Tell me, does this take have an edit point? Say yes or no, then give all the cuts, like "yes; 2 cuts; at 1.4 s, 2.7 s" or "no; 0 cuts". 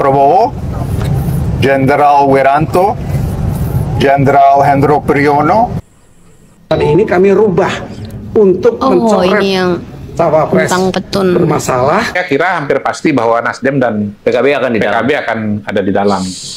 yes; 2 cuts; at 5.8 s, 12.2 s